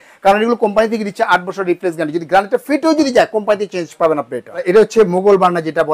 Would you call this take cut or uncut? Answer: cut